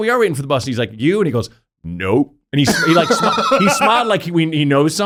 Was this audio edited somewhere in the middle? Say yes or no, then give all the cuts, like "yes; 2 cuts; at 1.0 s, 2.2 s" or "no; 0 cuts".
no; 0 cuts